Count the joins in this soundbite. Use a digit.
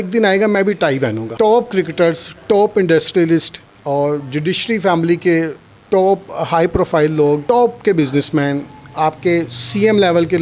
2